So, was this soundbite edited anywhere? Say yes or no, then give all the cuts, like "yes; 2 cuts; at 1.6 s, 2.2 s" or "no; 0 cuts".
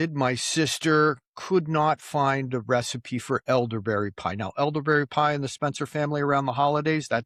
no; 0 cuts